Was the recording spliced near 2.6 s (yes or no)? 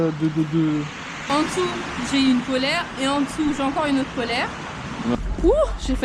no